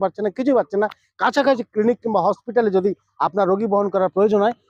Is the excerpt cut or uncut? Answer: uncut